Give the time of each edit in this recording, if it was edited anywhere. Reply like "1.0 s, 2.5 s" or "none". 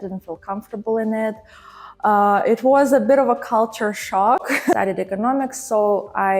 4.6 s